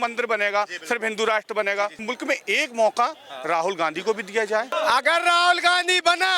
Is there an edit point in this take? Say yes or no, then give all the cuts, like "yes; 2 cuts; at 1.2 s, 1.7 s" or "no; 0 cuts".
yes; 2 cuts; at 2.0 s, 4.7 s